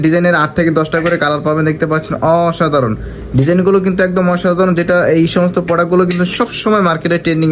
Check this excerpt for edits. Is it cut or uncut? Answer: uncut